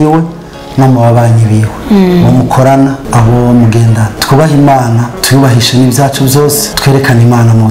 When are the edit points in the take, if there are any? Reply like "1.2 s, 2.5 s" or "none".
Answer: 1.7 s, 3.0 s, 4.2 s, 5.1 s, 6.7 s

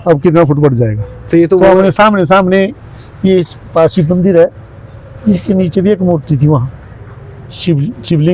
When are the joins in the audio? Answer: none

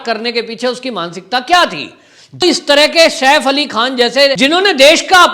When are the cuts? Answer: 2.4 s, 4.4 s

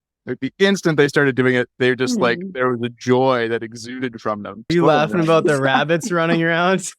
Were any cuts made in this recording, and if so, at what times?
4.7 s

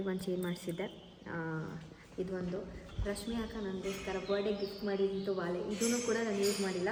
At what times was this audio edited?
none

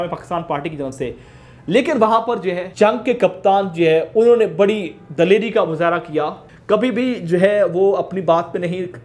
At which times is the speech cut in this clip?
2.7 s, 6.4 s

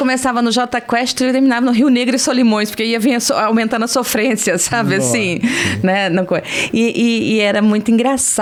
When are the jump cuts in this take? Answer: none

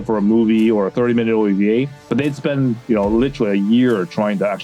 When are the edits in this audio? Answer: none

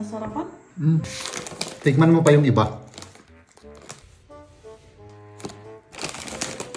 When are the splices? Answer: 1.0 s

